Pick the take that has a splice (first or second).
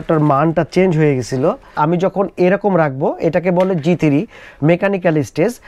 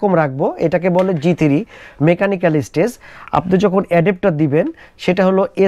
first